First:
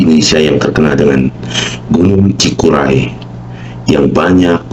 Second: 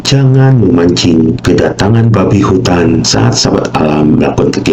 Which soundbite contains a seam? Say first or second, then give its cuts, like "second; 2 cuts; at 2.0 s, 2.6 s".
second; 2 cuts; at 1.4 s, 3.1 s